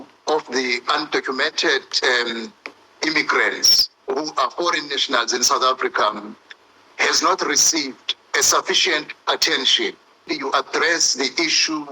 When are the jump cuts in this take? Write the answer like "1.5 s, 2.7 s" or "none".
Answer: 10.3 s